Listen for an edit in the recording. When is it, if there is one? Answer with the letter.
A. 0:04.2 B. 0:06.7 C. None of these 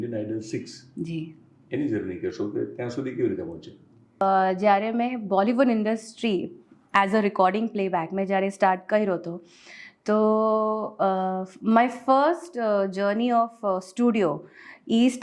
A